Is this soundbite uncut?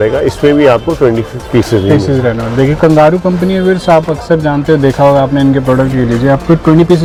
yes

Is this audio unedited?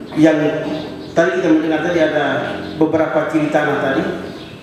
yes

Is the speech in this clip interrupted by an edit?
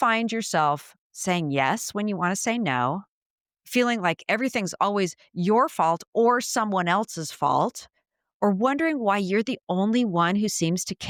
no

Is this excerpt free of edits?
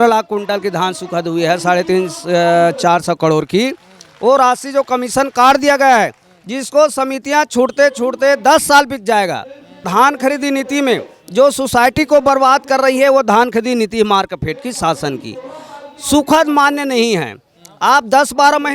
no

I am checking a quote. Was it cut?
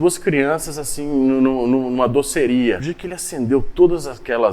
yes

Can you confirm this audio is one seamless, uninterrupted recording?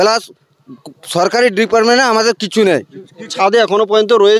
no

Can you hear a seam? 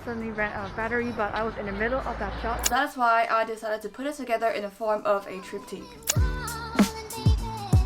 yes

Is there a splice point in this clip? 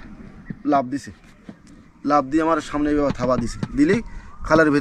no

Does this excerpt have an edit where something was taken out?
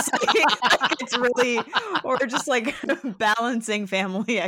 no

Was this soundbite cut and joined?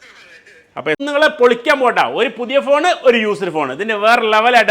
yes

